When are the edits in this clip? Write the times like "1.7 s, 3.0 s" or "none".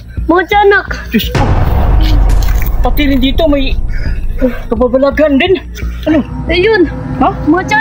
6.0 s